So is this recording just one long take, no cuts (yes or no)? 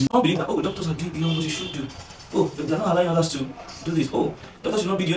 yes